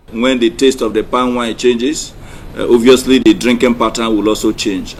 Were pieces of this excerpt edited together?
no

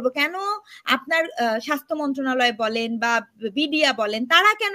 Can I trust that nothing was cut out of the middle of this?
yes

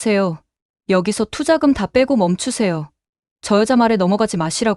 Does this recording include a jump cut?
no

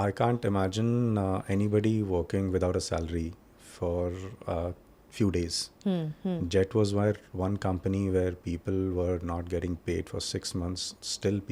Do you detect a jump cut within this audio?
no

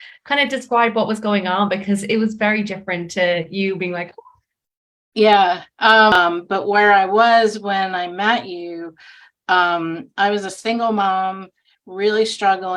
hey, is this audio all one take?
no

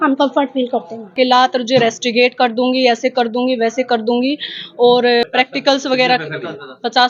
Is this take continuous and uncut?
no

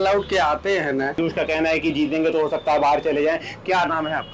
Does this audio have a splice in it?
yes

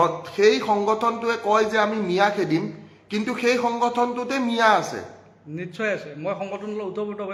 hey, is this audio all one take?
yes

